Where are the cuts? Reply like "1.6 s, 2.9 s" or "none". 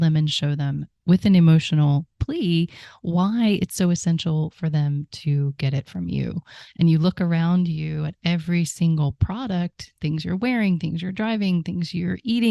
6.6 s